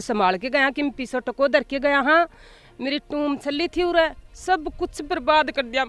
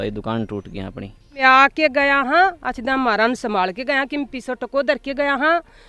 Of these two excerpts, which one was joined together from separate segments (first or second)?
second